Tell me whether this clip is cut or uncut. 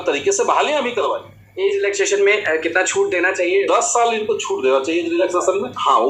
uncut